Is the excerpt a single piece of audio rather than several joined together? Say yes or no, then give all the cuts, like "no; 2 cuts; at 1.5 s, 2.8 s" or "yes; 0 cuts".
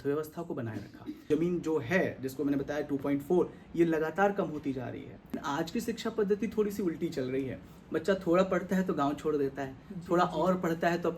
no; 2 cuts; at 1.1 s, 5.4 s